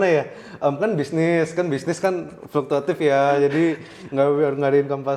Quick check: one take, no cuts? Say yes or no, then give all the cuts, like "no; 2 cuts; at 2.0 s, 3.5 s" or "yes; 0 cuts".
yes; 0 cuts